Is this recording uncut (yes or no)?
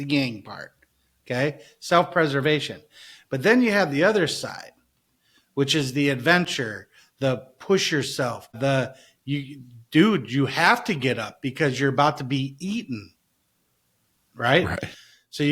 yes